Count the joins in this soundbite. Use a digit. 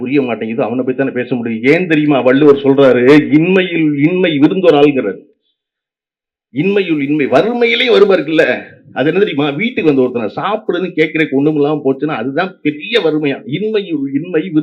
0